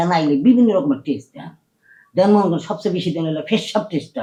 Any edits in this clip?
no; 0 cuts

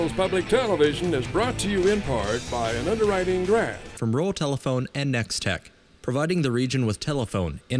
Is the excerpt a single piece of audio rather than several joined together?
no; 1 cut; at 3.8 s

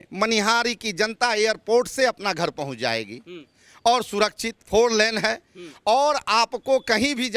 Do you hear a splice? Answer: no; 0 cuts

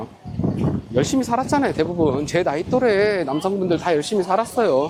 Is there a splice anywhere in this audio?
no; 0 cuts

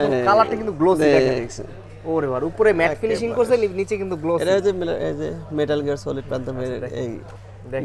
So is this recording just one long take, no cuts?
yes; 0 cuts

